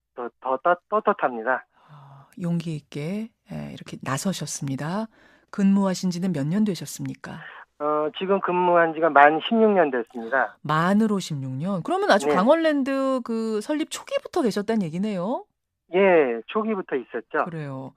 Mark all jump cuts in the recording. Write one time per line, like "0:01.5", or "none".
0:14.7